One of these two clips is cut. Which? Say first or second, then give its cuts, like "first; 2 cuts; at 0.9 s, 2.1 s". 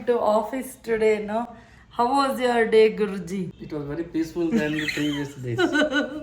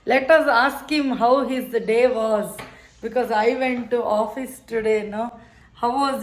first; 1 cut; at 3.6 s